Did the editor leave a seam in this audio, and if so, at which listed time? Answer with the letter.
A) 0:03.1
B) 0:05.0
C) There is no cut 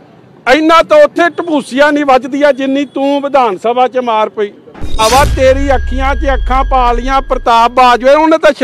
B